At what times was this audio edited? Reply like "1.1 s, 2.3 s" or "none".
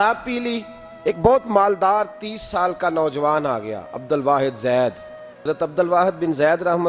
1.2 s, 5.4 s